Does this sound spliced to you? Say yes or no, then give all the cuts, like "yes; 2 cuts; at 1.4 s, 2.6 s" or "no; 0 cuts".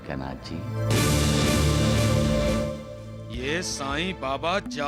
no; 0 cuts